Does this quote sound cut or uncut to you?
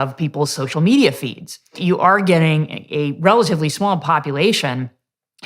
cut